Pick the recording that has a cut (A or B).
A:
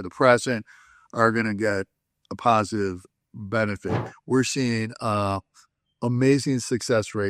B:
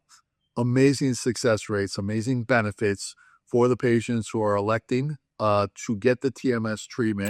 A